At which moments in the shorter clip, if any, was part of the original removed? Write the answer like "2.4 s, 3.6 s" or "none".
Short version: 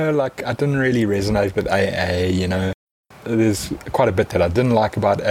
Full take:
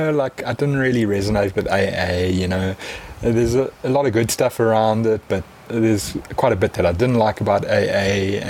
3.1 s